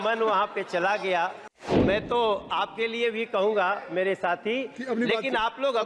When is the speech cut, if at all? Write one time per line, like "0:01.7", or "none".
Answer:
0:01.8